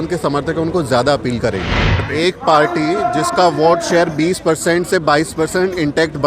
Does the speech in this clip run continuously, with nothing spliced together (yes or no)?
no